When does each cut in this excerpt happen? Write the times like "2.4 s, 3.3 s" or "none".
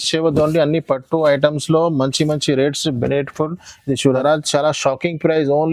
4.2 s